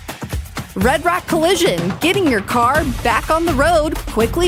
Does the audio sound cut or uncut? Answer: uncut